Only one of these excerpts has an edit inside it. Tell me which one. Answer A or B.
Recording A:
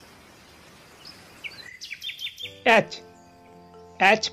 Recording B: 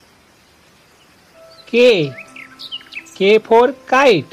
B